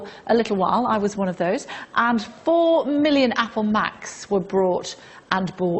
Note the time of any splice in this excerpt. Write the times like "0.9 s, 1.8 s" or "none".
none